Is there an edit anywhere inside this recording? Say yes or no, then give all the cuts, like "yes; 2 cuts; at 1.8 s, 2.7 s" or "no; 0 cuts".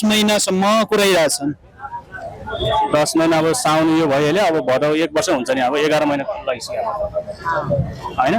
no; 0 cuts